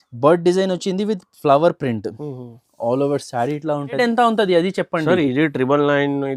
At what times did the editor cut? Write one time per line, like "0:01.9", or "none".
0:04.0